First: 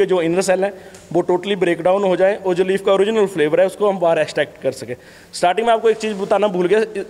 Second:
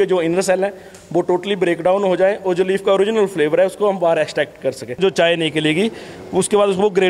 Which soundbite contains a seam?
second; 1 cut; at 5.0 s

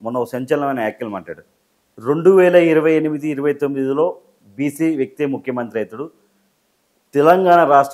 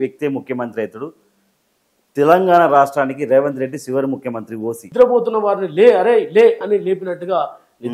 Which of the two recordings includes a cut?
second; 1 cut; at 4.8 s

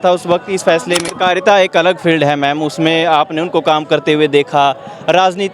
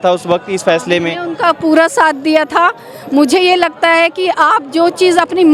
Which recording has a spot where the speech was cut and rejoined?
first; 1 cut; at 1.1 s

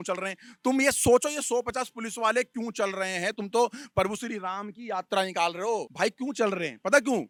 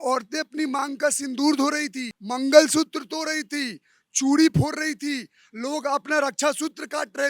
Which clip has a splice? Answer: second; 1 cut; at 2.2 s

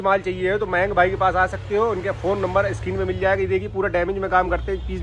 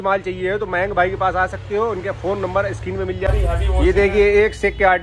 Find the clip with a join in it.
second; 1 cut; at 3.3 s

